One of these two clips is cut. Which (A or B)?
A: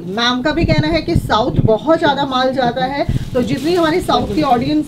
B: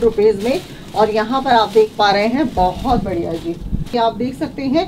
B